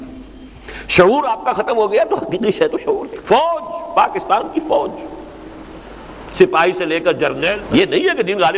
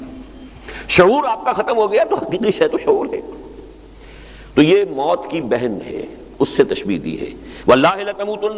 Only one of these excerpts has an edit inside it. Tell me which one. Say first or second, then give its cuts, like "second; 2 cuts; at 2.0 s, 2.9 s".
first; 2 cuts; at 3.1 s, 7.6 s